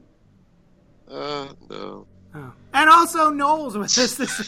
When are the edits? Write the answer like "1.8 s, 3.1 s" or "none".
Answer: none